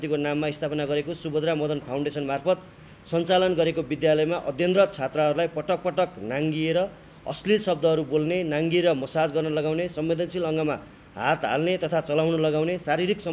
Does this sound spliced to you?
no; 0 cuts

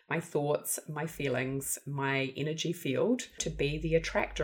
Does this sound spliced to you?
yes; 1 cut; at 3.5 s

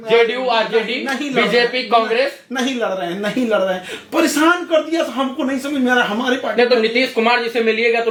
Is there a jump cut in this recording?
no; 0 cuts

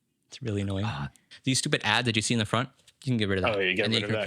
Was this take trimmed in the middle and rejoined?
yes; 1 cut; at 1.3 s

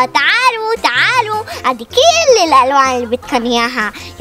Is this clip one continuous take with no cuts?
yes; 0 cuts

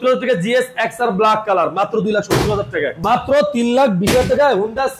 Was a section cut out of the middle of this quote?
yes; 1 cut; at 3.0 s

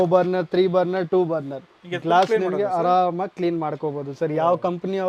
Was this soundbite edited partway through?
no; 0 cuts

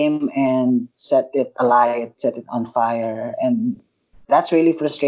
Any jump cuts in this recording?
yes; 1 cut; at 0.9 s

